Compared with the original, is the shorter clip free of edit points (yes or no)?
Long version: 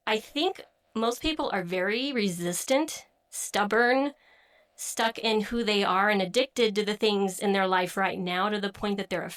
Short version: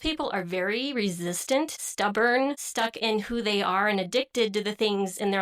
no